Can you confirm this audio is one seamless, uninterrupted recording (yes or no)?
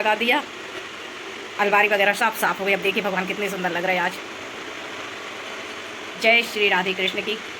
yes